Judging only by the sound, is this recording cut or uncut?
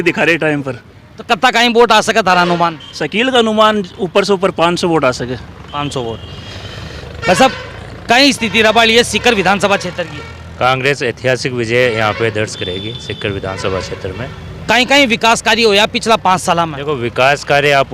uncut